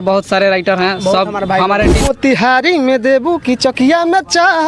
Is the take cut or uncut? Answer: cut